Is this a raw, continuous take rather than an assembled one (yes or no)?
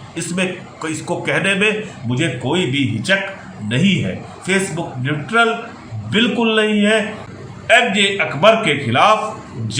no